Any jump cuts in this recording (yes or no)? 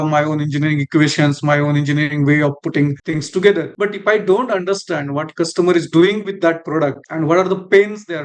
no